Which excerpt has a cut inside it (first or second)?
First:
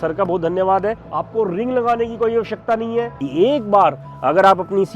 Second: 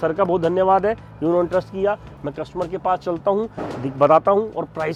first